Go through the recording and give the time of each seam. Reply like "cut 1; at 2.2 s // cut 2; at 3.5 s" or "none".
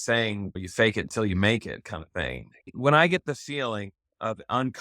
cut 1; at 2.7 s